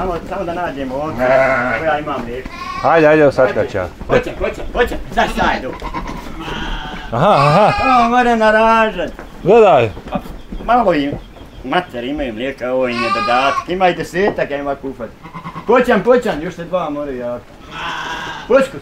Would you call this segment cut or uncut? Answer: cut